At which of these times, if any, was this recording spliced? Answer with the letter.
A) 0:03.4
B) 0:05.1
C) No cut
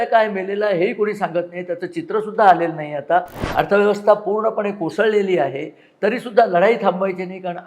A